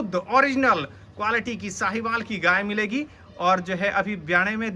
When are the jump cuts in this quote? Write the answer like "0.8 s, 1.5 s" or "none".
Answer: none